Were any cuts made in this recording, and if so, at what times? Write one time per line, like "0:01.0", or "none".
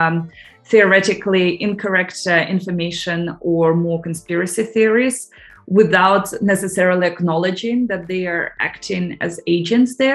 none